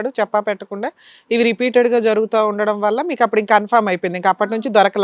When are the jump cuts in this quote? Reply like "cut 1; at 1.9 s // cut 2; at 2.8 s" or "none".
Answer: none